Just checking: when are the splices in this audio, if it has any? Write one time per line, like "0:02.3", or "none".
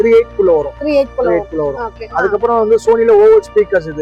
none